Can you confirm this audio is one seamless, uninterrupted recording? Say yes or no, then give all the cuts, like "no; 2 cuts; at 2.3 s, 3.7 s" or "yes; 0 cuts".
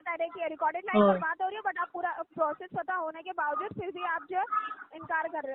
yes; 0 cuts